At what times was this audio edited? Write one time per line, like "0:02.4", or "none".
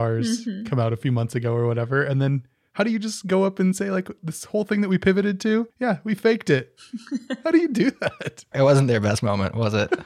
0:01.0
0:04.3
0:05.7

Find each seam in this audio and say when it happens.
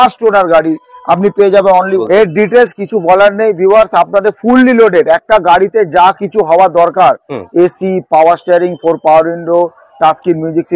0:02.1

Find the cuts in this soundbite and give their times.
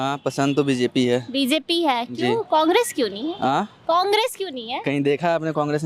none

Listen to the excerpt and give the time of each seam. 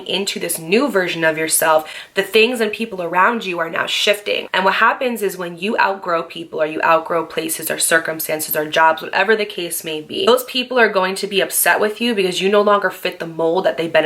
0:04.4
0:10.3

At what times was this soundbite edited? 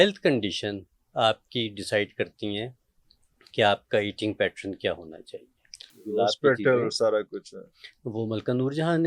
0:06.0

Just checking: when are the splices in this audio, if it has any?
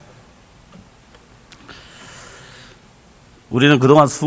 none

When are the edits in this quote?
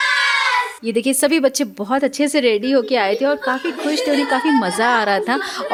none

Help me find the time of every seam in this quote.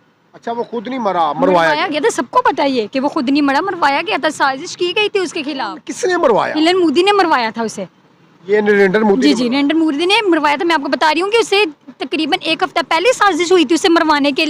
0:05.8

